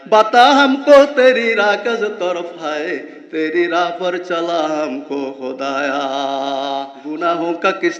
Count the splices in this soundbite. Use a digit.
1